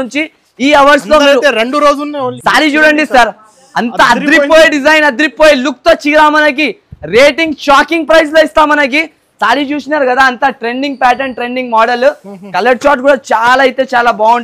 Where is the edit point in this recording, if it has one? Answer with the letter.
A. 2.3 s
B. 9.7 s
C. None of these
A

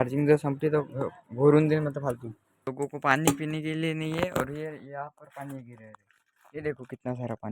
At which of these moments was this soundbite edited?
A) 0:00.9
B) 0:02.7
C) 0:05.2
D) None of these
B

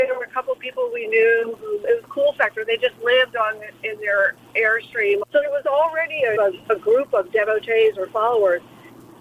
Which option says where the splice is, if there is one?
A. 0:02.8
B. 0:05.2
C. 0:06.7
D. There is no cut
B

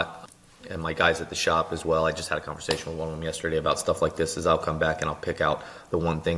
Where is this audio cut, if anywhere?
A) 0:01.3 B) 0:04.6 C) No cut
C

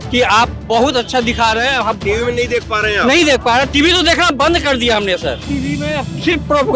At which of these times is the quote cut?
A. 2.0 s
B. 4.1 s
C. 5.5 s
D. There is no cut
C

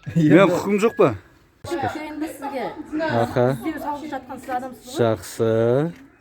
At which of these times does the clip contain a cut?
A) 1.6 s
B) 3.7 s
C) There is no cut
A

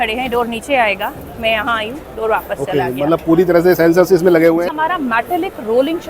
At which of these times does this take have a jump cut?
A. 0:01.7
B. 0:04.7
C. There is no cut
B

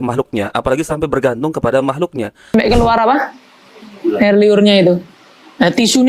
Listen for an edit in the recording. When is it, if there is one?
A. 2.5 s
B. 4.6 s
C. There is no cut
A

